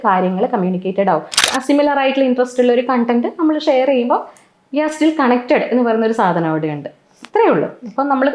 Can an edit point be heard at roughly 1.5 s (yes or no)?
yes